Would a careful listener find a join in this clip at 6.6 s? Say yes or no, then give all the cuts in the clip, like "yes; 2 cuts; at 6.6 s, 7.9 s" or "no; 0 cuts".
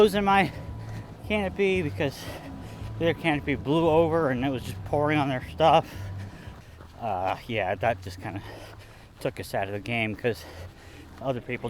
yes; 1 cut; at 6.6 s